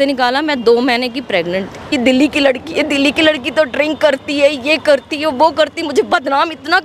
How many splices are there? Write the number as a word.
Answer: one